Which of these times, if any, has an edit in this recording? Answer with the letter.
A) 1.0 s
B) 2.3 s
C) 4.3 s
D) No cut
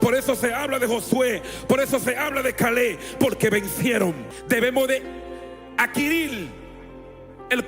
C